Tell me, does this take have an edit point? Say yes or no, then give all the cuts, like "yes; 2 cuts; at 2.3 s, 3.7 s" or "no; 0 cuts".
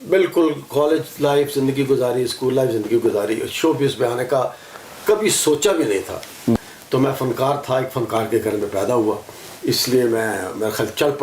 yes; 1 cut; at 6.6 s